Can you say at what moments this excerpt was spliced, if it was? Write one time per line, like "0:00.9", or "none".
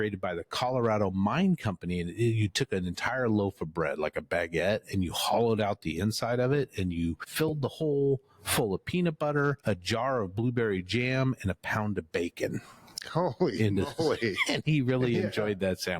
0:07.2
0:09.6